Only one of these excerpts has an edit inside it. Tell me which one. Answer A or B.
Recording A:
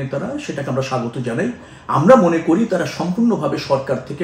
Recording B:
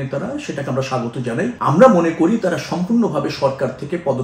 B